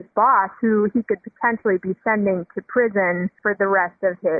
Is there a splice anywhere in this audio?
yes; 1 cut; at 3.4 s

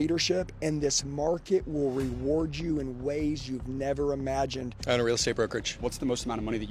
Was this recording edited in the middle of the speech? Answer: yes; 2 cuts; at 4.7 s, 5.7 s

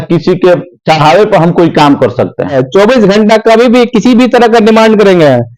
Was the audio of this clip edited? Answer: yes; 1 cut; at 2.6 s

